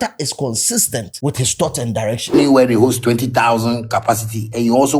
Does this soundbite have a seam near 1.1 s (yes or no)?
yes